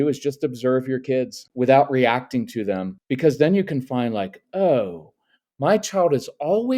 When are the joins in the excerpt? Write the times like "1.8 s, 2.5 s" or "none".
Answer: 1.4 s, 3.0 s